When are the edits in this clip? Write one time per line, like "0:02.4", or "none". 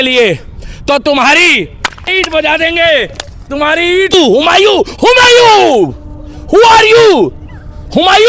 0:02.1
0:04.1